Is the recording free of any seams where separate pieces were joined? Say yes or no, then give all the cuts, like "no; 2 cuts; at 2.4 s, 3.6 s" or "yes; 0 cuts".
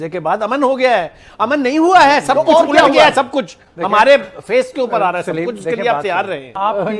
yes; 0 cuts